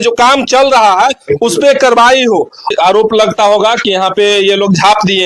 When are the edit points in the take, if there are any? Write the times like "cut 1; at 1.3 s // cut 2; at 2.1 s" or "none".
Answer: cut 1; at 2.7 s